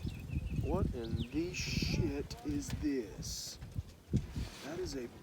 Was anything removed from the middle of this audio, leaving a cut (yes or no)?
no